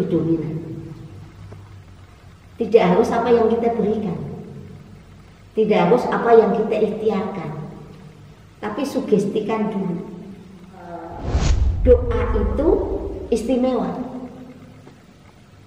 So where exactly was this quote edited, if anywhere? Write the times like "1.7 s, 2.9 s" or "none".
11.2 s